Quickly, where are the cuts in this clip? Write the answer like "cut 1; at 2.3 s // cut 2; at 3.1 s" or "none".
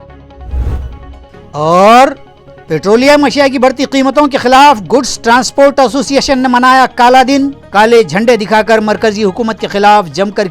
cut 1; at 1.2 s